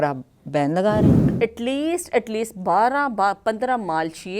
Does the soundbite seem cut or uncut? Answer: cut